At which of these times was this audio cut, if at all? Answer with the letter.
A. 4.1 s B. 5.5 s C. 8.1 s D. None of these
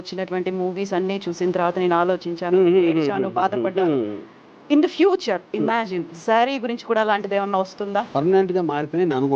C